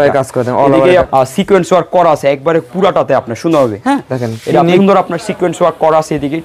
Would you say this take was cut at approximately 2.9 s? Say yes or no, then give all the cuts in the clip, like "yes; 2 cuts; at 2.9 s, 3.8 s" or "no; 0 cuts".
no; 2 cuts; at 1.1 s, 4.8 s